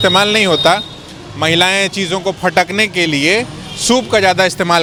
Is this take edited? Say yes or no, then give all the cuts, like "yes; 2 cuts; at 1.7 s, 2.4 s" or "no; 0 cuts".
no; 0 cuts